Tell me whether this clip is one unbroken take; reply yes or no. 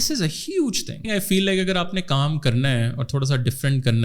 no